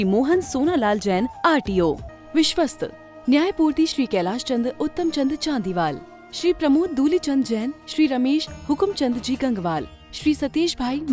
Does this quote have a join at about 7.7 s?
no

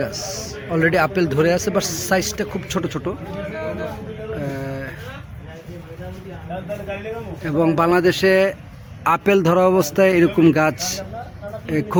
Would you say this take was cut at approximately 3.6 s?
no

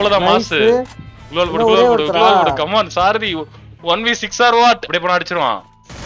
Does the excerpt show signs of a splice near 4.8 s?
yes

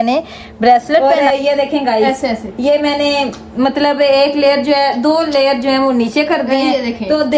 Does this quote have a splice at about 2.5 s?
no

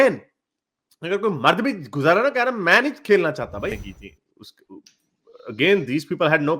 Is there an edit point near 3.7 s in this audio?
yes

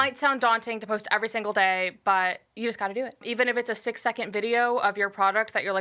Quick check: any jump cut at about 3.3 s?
yes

